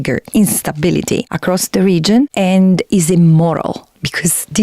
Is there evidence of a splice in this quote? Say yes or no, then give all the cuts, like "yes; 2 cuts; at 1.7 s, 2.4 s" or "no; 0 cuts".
yes; 2 cuts; at 1.3 s, 2.3 s